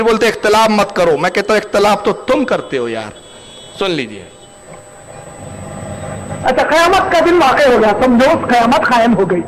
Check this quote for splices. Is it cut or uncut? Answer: uncut